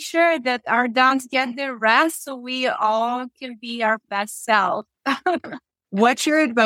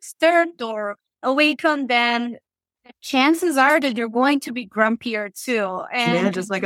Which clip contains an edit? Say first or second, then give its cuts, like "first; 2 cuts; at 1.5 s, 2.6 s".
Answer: second; 1 cut; at 1.2 s